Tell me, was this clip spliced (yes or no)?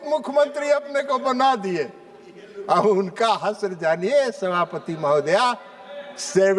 no